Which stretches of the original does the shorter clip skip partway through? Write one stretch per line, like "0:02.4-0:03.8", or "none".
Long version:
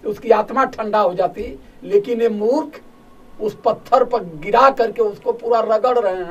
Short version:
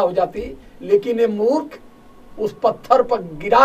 none